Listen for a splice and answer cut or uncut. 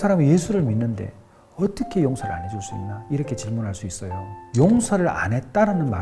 cut